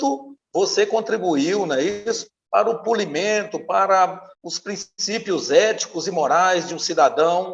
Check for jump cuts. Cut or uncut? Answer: uncut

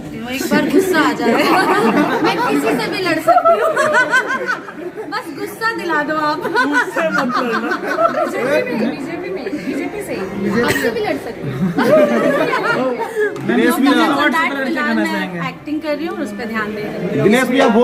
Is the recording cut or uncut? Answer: uncut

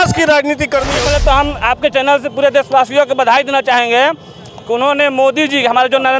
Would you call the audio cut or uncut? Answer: cut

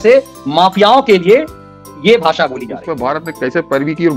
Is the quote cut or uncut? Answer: cut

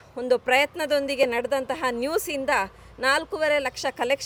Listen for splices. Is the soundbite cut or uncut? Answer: uncut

